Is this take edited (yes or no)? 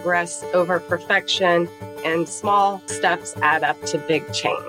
no